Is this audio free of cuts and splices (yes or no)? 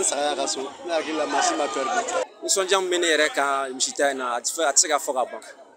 no